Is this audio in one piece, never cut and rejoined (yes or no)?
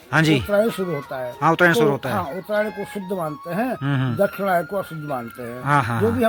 yes